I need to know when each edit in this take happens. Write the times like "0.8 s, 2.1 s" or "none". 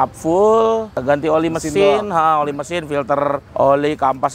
1.0 s, 3.4 s